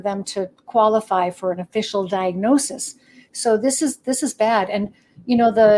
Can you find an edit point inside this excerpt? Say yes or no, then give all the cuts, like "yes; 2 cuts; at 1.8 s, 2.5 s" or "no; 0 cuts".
no; 0 cuts